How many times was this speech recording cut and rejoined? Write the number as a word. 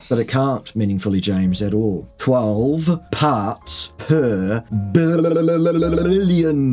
zero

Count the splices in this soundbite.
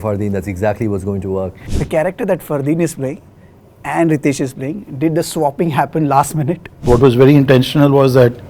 two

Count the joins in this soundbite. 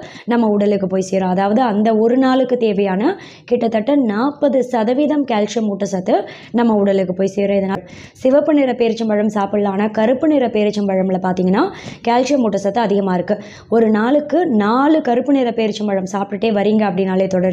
one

